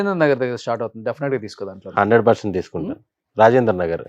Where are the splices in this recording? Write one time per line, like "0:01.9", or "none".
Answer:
none